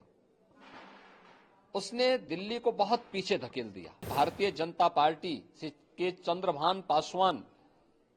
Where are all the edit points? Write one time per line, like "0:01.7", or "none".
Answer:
0:04.1